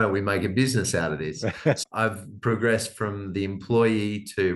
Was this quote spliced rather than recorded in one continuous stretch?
yes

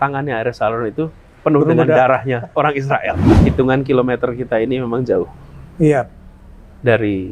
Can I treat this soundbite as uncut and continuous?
no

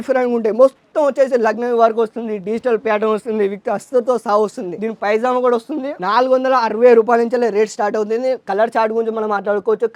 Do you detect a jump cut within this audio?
no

